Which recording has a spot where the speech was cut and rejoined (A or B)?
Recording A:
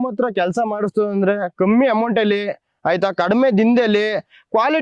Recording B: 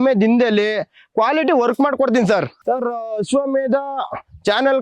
B